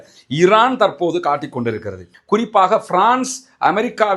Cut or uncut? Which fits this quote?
cut